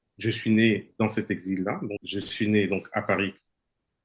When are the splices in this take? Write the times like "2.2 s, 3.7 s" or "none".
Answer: 2.0 s